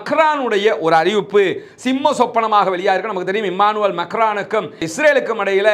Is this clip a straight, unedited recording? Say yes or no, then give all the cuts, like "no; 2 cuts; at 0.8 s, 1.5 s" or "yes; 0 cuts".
yes; 0 cuts